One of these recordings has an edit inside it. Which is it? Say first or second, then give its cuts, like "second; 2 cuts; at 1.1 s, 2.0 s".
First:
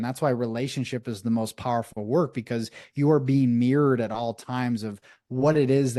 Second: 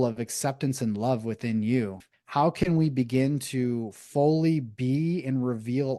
second; 1 cut; at 2.0 s